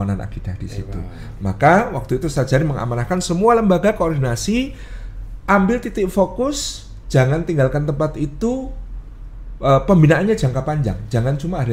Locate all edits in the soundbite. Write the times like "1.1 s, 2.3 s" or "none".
none